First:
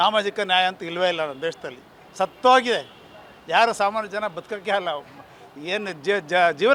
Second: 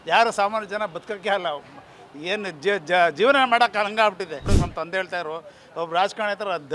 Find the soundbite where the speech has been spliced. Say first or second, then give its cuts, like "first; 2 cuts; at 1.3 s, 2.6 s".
second; 1 cut; at 4.5 s